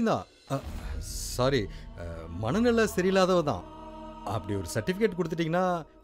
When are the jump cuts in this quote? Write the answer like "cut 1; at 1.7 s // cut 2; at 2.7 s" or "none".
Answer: none